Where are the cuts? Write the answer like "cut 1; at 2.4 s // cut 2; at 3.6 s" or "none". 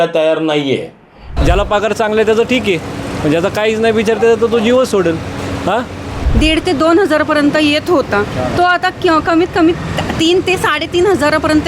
cut 1; at 1.2 s // cut 2; at 6.2 s